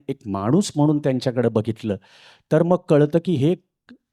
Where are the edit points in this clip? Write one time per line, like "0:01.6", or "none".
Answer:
none